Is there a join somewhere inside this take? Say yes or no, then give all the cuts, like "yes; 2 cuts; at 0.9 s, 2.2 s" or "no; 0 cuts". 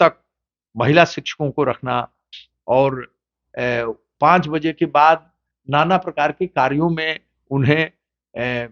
no; 0 cuts